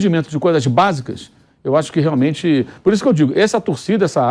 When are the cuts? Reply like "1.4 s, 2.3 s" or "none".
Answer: none